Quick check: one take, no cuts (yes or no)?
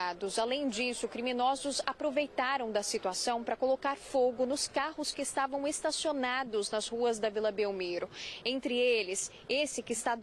yes